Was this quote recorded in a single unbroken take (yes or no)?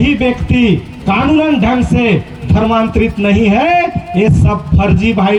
yes